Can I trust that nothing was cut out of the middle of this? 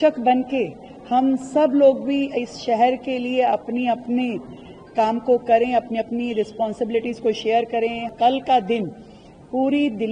no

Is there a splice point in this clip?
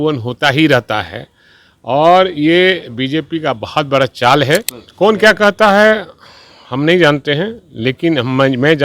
yes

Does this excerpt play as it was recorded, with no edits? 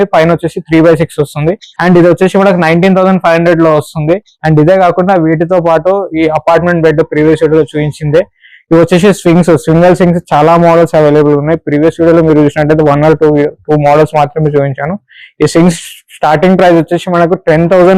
yes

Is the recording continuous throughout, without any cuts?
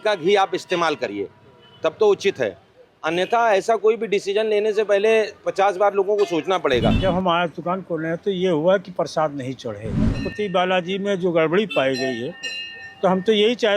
no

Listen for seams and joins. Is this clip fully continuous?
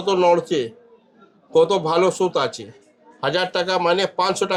yes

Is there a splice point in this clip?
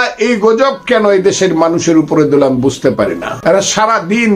yes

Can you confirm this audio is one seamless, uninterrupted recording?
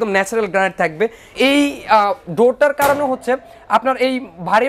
no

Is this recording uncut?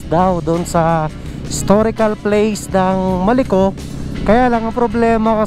yes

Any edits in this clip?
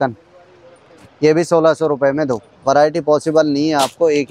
yes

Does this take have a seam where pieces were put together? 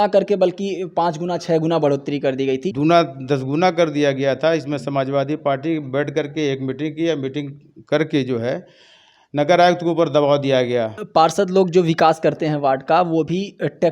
yes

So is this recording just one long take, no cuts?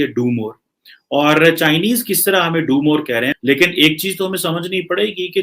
no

